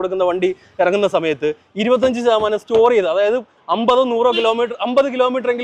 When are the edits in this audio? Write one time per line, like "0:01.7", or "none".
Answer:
none